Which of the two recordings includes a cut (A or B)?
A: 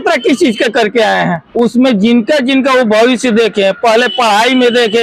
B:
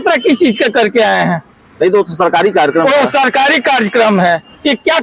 A